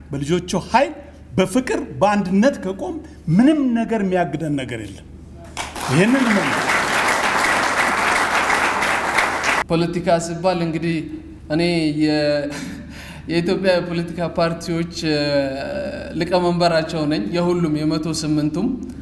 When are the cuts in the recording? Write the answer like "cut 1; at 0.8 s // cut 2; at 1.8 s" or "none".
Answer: cut 1; at 9.6 s